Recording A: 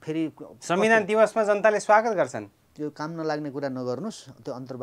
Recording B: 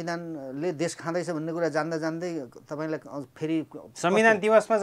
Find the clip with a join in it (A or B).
A